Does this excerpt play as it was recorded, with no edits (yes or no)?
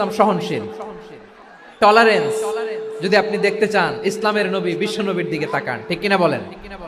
yes